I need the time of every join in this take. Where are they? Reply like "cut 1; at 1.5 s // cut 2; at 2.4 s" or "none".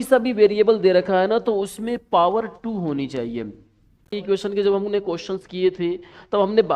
cut 1; at 4.1 s